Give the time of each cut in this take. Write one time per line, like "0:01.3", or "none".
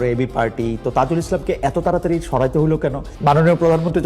0:03.1